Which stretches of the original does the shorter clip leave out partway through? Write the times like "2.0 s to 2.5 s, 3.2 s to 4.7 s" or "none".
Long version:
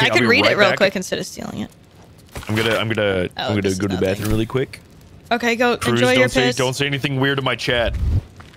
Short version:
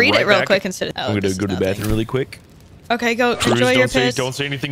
1.3 s to 3.4 s